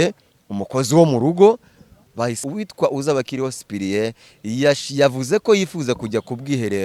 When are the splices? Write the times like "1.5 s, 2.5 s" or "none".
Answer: 2.4 s